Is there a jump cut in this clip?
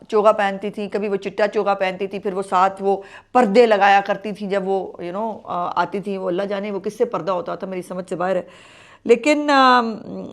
no; 0 cuts

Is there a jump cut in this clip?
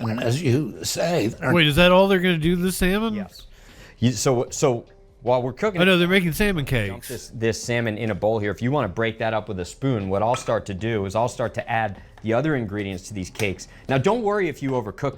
yes; 1 cut; at 1.4 s

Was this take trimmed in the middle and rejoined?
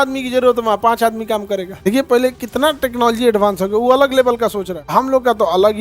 yes; 2 cuts; at 1.8 s, 4.8 s

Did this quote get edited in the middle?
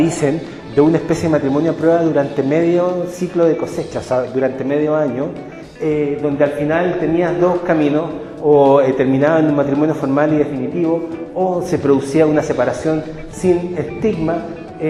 no; 0 cuts

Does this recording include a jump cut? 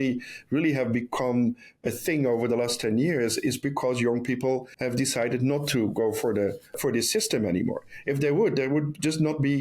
yes; 2 cuts; at 4.7 s, 6.8 s

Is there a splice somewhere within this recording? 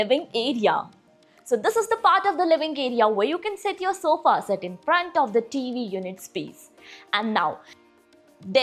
no; 0 cuts

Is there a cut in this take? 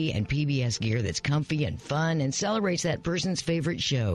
no; 0 cuts

